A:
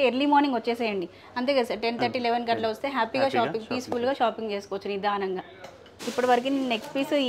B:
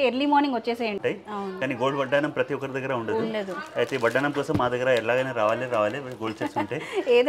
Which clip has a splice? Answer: B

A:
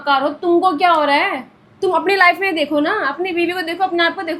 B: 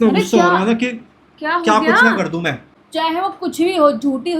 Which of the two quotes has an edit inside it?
B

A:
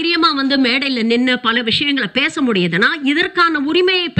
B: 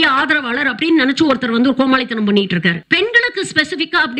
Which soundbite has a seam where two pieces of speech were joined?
B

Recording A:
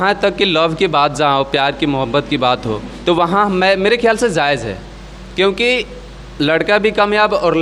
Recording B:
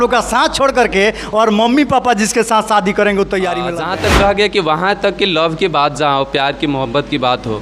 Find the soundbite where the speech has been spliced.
B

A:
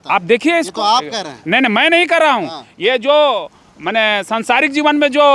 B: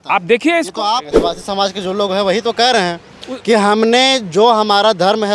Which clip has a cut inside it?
B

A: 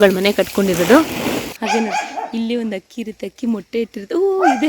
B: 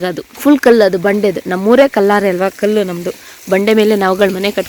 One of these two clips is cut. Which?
A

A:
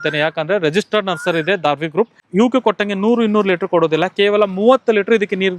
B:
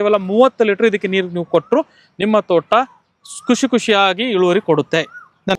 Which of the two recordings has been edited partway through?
A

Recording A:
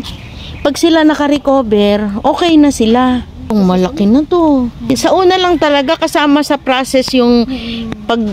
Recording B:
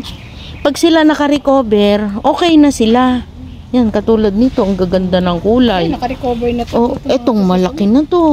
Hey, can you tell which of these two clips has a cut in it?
A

